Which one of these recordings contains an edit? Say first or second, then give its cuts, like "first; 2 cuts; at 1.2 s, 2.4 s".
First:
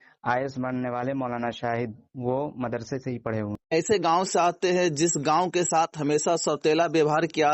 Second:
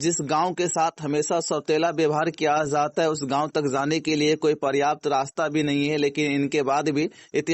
first; 1 cut; at 3.6 s